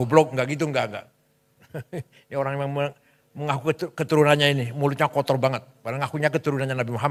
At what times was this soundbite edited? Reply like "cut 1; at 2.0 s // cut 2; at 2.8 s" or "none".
none